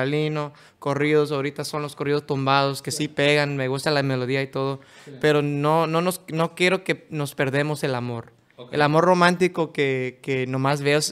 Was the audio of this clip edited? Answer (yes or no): no